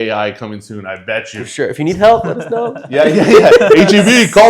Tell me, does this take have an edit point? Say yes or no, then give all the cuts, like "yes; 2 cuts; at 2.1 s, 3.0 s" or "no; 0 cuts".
no; 0 cuts